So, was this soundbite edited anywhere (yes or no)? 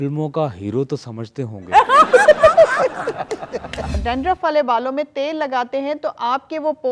yes